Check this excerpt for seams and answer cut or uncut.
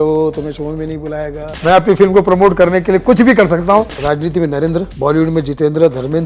cut